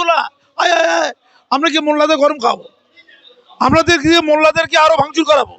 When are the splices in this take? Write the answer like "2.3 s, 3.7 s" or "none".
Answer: none